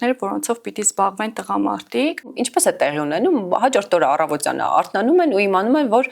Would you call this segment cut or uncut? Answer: cut